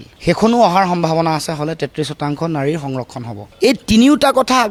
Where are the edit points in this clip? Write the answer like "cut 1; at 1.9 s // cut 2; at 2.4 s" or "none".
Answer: none